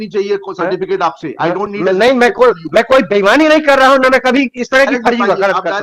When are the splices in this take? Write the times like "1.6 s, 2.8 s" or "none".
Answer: none